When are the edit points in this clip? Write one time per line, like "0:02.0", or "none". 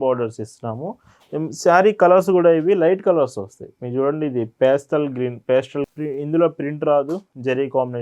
0:05.9